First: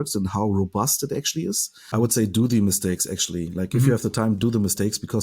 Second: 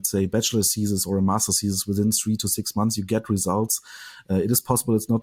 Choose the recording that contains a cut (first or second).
first